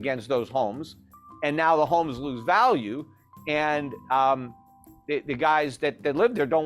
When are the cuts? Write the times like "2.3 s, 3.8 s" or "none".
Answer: none